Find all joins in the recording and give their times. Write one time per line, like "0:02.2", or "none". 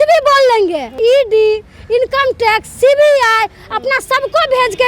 0:01.0